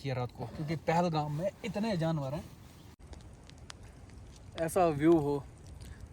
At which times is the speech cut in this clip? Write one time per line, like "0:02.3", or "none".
0:03.0